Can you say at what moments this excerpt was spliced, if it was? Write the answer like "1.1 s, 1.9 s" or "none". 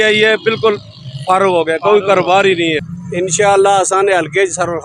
3.0 s

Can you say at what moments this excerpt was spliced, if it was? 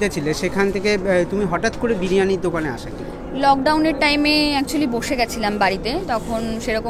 none

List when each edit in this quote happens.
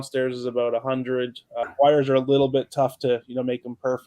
1.4 s

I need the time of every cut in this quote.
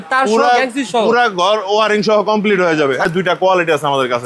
3.1 s

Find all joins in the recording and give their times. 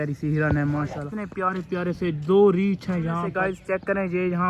1.2 s, 3.4 s

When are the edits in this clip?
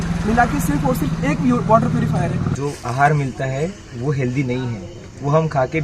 2.5 s

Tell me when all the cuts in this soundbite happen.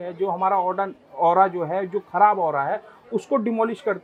none

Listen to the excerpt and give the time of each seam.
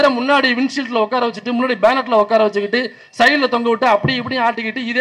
none

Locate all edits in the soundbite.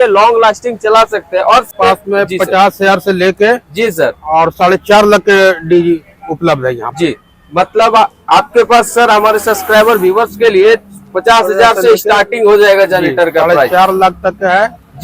1.7 s

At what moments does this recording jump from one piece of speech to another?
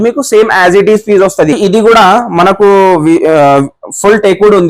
1.6 s

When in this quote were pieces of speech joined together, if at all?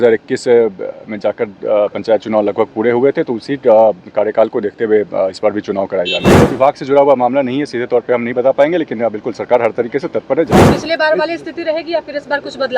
6.4 s, 10.7 s

